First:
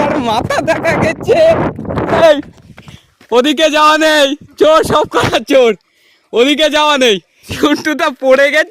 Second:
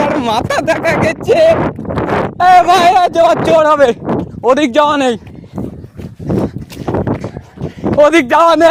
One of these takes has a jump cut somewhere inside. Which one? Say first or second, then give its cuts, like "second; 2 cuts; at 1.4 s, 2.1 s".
first; 2 cuts; at 2.2 s, 7.5 s